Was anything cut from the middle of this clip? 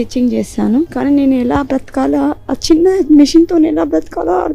yes; 1 cut; at 0.9 s

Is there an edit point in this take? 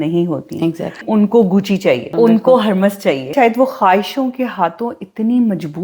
yes; 3 cuts; at 1.0 s, 2.1 s, 3.3 s

